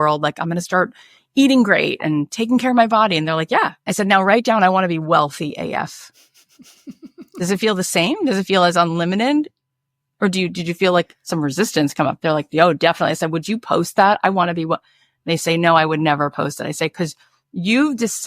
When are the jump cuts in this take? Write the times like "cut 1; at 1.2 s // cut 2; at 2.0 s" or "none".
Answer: cut 1; at 3.8 s